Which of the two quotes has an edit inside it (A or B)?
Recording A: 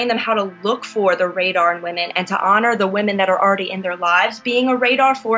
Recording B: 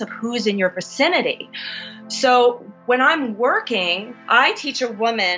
B